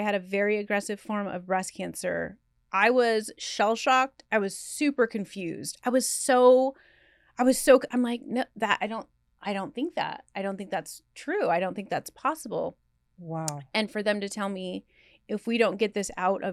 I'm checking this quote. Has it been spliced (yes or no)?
no